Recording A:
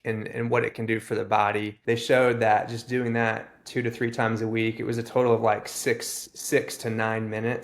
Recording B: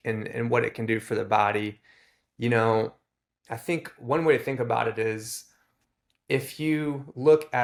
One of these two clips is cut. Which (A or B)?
A